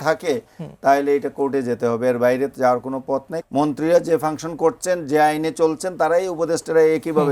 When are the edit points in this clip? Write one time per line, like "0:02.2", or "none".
0:03.3